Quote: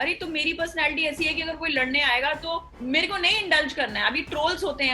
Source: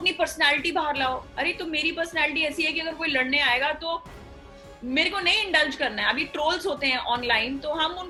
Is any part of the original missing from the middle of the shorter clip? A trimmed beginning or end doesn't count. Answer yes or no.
yes